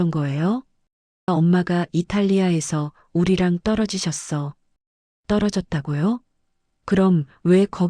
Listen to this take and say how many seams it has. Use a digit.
1